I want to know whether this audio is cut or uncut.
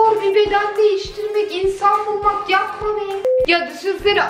cut